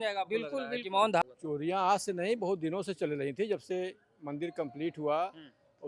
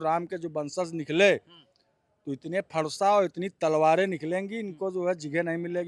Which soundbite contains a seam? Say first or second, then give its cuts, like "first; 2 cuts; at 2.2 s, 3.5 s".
first; 1 cut; at 1.2 s